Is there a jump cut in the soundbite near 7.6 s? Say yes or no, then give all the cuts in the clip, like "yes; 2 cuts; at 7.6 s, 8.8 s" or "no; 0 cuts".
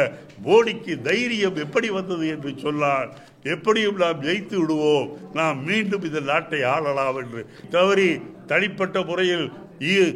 yes; 1 cut; at 7.6 s